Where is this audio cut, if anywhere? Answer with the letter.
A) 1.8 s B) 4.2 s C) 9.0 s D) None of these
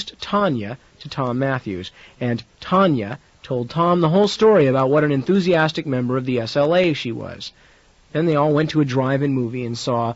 D